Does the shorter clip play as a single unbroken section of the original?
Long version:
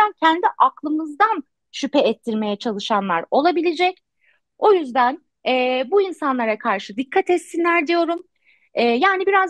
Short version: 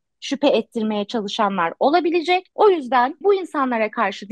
no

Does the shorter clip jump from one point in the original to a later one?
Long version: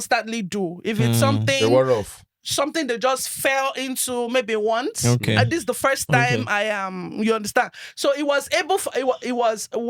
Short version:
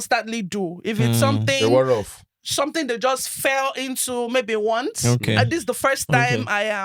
no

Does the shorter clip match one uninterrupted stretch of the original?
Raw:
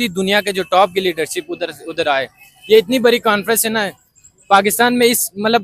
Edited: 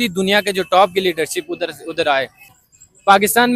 no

